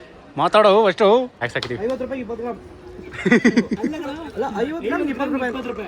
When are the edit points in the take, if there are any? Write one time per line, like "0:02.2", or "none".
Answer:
0:01.4